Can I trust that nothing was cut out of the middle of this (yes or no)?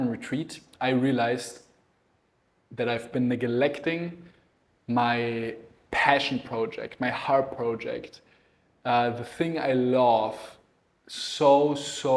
yes